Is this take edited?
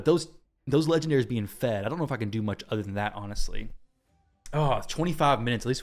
no; 0 cuts

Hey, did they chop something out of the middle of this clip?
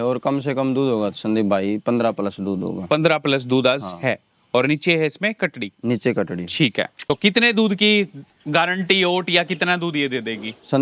yes; 1 cut; at 7.0 s

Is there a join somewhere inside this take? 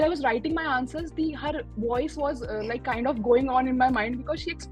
no; 0 cuts

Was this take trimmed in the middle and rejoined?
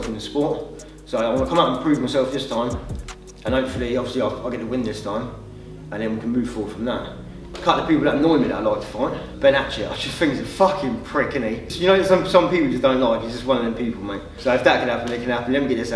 yes; 4 cuts; at 7.5 s, 9.3 s, 11.7 s, 14.3 s

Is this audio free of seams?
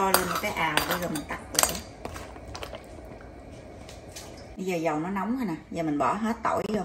no; 1 cut; at 4.4 s

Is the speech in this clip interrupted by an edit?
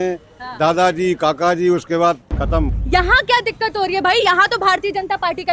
yes; 1 cut; at 2.8 s

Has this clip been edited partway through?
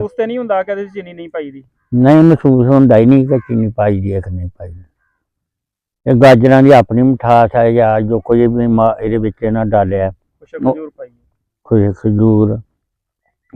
no; 0 cuts

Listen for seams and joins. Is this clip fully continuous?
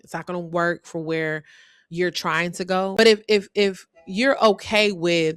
no; 1 cut; at 3.0 s

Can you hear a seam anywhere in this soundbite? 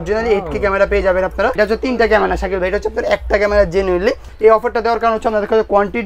yes; 2 cuts; at 1.6 s, 4.3 s

